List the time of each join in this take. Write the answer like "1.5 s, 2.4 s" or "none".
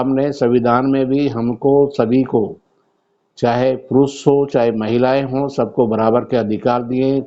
none